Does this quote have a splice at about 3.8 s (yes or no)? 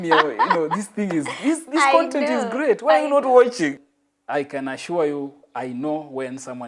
yes